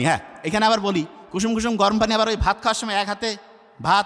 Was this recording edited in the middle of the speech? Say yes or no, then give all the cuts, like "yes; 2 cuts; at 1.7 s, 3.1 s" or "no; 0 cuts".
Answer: no; 0 cuts